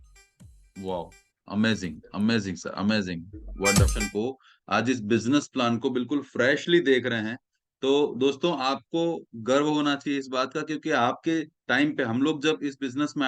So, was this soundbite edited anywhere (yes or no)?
yes